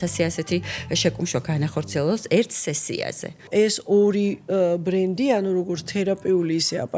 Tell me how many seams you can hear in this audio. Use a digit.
1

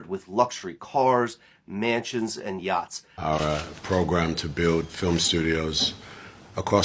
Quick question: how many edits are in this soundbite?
1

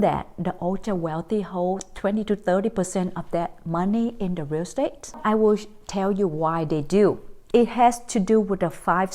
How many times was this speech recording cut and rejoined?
2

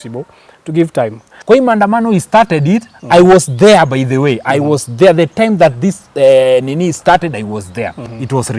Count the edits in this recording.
1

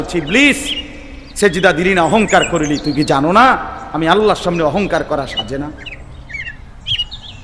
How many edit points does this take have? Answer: 1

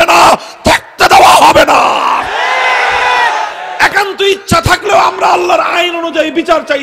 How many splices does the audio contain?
1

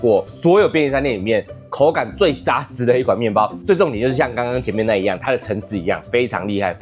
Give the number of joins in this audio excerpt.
1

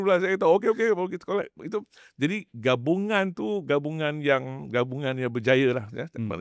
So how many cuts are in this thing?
0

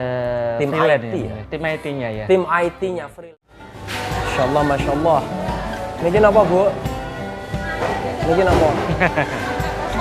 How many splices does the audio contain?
1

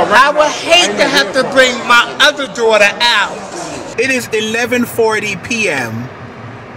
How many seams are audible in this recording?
1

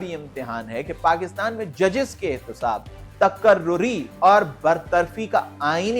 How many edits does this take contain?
0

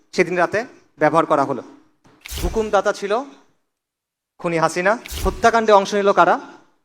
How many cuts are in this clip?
2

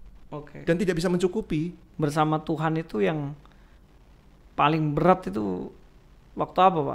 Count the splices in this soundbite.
1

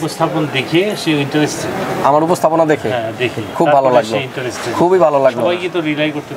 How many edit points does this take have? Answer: 0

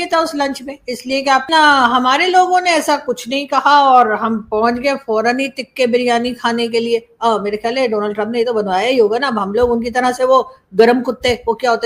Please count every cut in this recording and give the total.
1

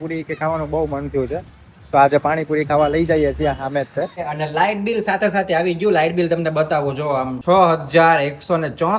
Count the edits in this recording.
2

